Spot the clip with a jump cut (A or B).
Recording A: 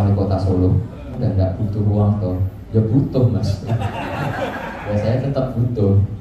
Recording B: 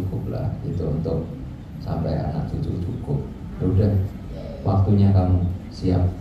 A